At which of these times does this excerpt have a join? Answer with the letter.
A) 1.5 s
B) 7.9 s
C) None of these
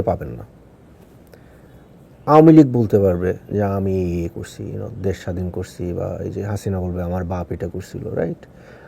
A